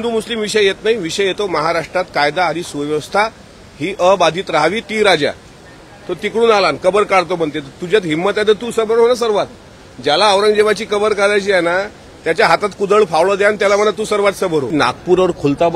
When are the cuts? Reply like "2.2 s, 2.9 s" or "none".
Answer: 4.8 s, 14.7 s